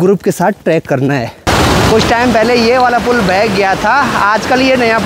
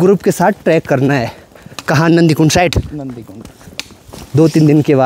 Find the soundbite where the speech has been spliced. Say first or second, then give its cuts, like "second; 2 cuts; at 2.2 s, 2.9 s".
first; 1 cut; at 1.4 s